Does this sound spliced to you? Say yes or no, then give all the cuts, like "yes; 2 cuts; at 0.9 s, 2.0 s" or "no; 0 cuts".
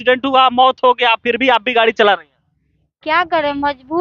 no; 0 cuts